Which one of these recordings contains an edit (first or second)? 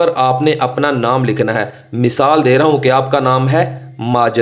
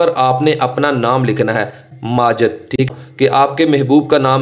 second